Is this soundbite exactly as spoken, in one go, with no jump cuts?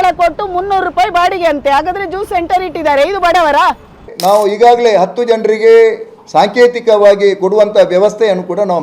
no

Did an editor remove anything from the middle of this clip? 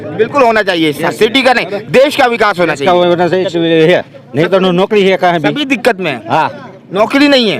yes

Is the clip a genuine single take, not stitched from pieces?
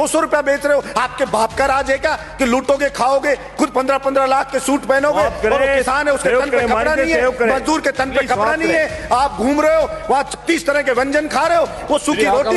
yes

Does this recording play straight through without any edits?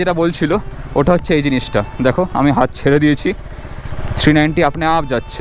yes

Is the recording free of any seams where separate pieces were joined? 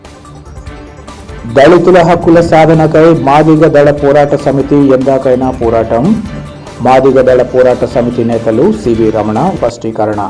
no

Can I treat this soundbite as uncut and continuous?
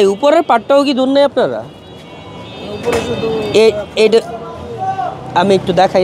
yes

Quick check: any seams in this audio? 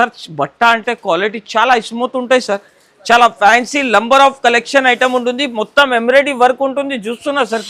no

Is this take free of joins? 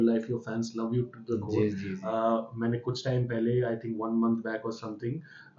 yes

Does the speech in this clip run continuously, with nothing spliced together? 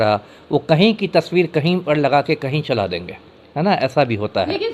yes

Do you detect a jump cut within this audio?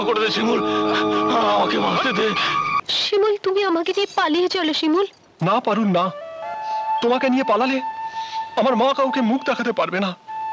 yes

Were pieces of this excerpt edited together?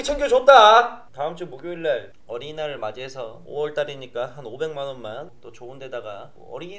yes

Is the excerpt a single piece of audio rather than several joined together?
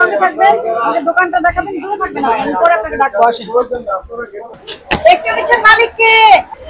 no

